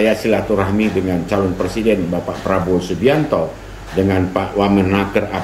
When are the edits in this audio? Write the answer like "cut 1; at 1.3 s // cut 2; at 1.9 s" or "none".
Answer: none